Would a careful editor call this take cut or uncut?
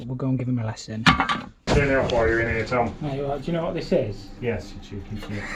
uncut